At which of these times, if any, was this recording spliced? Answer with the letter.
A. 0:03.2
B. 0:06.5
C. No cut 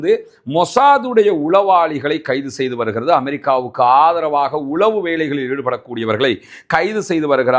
C